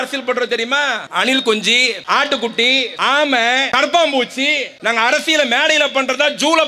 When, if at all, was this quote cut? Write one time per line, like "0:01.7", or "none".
0:01.0
0:02.0
0:02.9
0:03.7
0:04.7